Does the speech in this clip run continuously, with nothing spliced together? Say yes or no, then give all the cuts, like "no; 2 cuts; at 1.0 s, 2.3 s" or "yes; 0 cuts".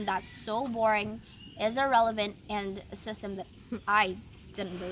yes; 0 cuts